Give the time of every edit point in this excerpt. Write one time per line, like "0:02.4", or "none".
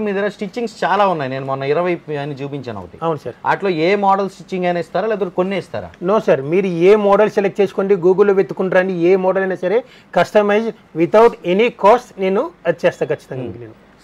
none

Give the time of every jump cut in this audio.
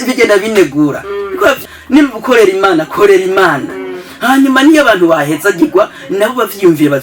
0:01.6

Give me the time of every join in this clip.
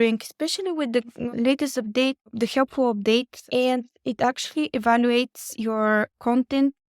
0:02.3
0:03.4

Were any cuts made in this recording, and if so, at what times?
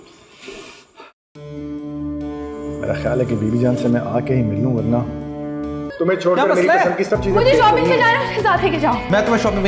0:05.9

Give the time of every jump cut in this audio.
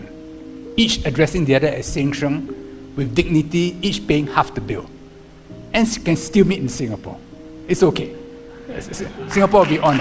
none

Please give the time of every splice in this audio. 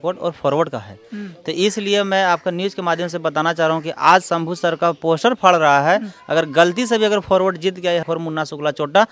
none

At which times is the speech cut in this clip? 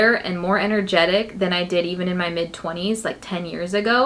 none

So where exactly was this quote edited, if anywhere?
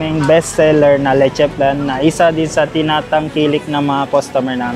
none

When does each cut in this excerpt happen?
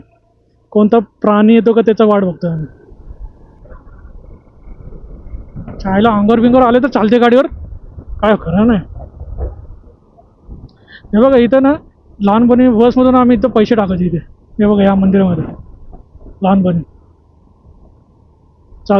0:03.0

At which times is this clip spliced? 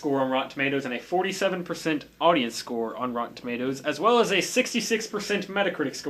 0:04.1

